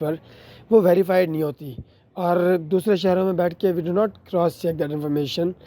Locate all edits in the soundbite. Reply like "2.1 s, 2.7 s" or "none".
none